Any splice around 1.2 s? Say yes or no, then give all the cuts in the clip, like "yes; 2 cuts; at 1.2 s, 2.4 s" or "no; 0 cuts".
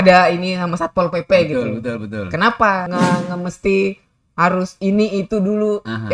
no; 1 cut; at 2.9 s